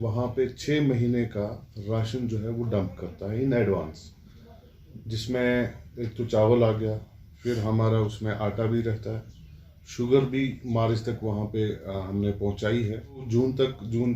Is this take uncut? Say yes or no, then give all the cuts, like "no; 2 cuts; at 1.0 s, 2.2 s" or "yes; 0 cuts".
no; 1 cut; at 13.3 s